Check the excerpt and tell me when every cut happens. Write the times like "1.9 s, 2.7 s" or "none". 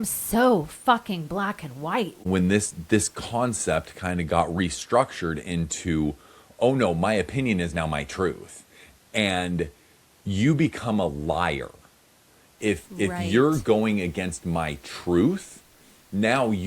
2.2 s